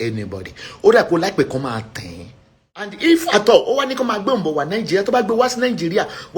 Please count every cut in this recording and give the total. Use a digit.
1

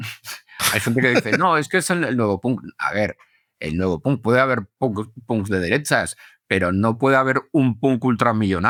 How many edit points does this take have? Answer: 0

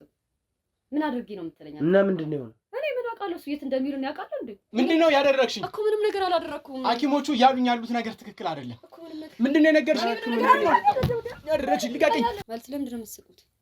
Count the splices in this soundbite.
2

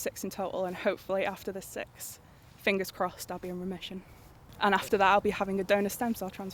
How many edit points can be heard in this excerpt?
1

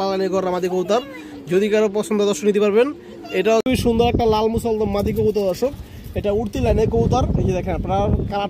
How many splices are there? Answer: 1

